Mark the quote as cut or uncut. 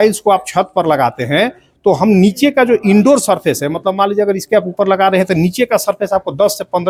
uncut